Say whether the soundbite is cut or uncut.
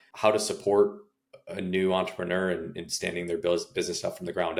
uncut